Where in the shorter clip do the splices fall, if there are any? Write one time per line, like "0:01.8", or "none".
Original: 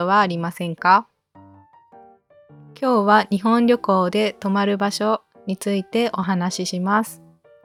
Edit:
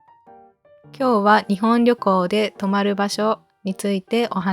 0:01.0

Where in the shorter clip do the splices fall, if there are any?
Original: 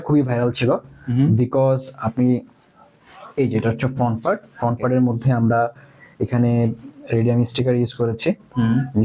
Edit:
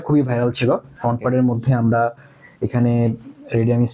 0:00.9

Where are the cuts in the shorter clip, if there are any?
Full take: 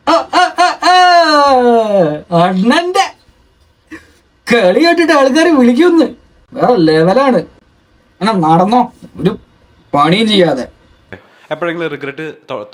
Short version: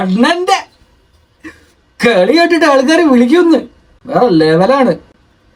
none

